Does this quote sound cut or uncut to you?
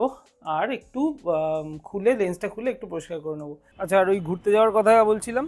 cut